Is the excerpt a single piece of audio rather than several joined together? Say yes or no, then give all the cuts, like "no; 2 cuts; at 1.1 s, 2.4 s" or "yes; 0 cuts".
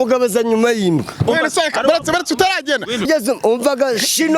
no; 1 cut; at 3.1 s